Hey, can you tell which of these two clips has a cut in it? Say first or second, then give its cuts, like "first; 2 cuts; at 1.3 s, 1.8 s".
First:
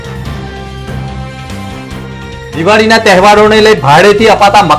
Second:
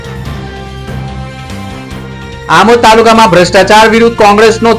first; 1 cut; at 2.4 s